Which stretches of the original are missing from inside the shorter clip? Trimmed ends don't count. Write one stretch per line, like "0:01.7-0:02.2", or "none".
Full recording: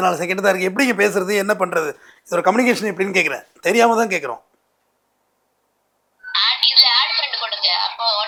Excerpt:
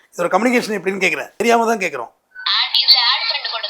0:03.5-0:03.6
0:04.6-0:06.1

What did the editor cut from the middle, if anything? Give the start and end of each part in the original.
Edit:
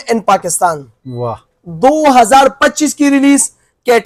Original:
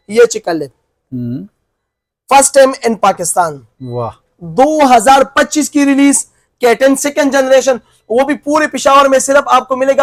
none

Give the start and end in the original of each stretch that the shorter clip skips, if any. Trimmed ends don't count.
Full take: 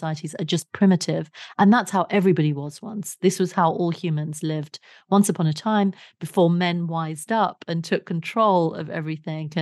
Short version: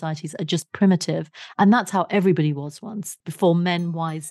0:03.1-0:06.0

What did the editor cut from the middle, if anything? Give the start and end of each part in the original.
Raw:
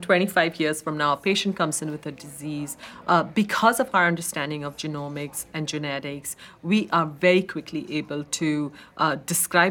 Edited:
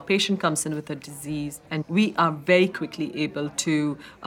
0:02.8-0:06.4

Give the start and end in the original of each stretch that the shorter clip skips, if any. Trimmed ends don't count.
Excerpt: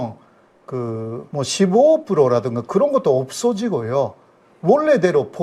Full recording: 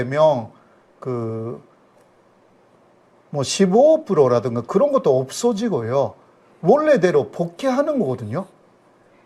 0:01.6-0:03.3

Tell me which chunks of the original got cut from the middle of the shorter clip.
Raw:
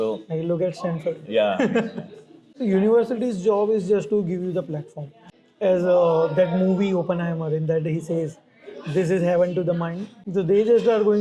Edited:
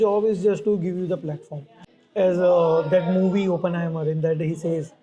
none

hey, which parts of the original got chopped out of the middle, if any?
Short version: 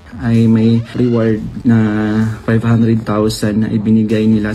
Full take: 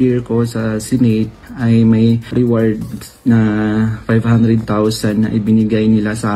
0:02.9-0:03.1

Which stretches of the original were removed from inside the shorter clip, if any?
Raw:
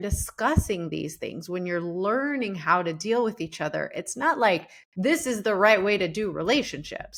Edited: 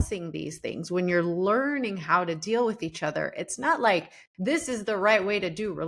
none

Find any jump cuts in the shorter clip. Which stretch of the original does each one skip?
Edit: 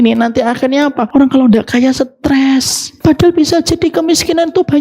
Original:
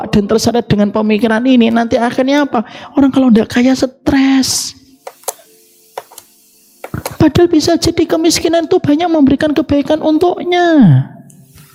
0:02.6-0:02.8
0:04.6-0:07.0

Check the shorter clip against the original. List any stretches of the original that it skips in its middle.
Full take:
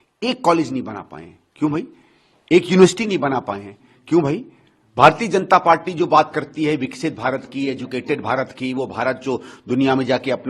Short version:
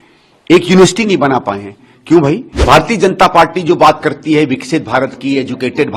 0:04.5-0:04.8

